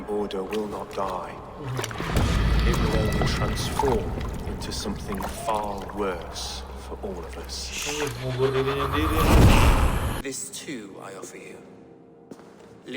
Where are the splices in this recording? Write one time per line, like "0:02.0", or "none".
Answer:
0:10.2